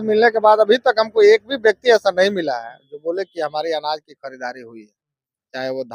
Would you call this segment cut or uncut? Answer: uncut